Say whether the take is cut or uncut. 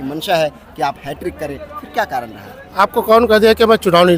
uncut